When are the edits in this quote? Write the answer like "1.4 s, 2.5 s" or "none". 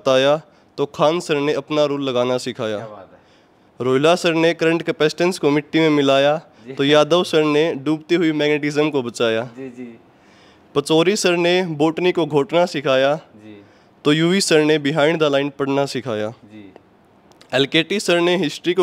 none